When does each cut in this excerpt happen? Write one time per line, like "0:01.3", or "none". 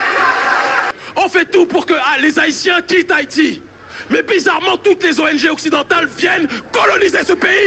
0:00.9